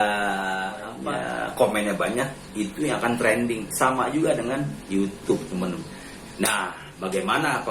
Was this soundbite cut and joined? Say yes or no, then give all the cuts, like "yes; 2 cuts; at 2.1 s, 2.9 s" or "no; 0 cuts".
yes; 1 cut; at 0.9 s